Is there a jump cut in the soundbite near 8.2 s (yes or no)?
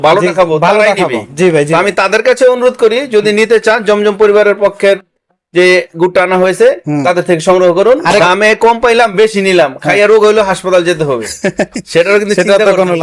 yes